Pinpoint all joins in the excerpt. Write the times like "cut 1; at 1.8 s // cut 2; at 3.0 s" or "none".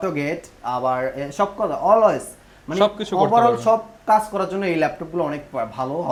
none